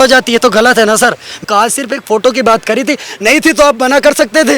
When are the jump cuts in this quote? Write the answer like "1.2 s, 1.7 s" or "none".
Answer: 1.4 s